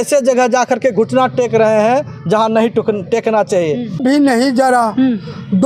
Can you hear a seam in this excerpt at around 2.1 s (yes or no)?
no